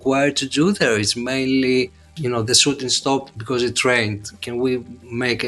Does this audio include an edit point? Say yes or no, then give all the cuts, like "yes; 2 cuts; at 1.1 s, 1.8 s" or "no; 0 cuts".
no; 0 cuts